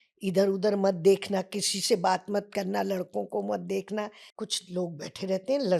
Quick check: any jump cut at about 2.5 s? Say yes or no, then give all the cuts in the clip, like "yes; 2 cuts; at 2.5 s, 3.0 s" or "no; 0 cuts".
no; 1 cut; at 4.2 s